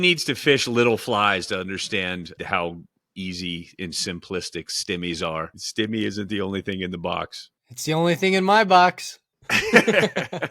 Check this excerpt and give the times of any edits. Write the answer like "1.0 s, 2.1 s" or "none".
2.3 s, 5.6 s

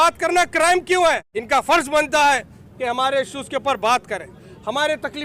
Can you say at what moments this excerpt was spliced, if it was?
1.3 s

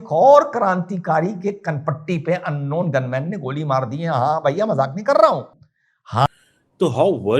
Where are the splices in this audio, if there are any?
6.3 s

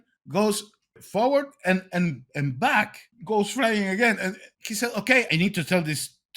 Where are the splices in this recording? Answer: 3.1 s, 4.5 s, 5.3 s

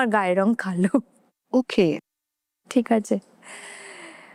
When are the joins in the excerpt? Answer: none

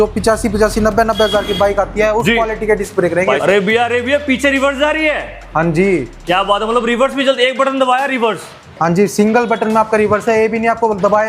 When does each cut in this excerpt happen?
3.4 s

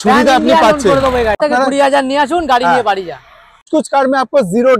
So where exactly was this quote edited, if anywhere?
1.4 s, 3.7 s

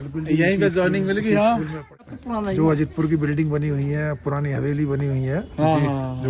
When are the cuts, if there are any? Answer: 2.0 s

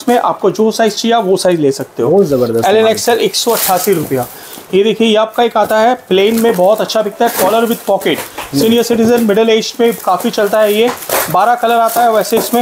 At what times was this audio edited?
none

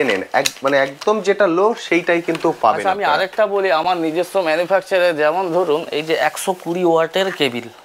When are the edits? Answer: none

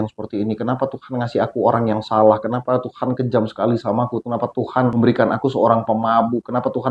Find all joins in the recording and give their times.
4.9 s

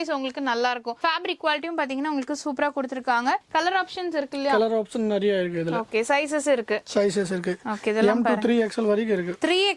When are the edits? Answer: none

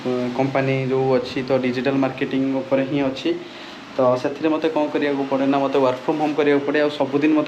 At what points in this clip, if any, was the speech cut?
none

